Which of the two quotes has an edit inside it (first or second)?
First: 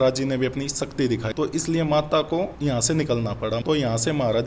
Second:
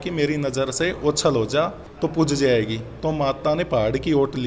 first